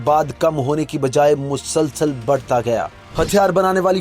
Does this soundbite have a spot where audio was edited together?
yes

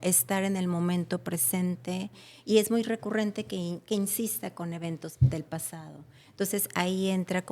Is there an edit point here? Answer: yes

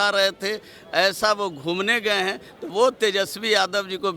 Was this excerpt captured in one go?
yes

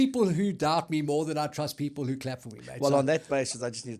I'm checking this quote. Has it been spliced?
no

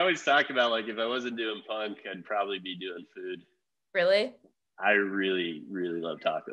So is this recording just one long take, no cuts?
yes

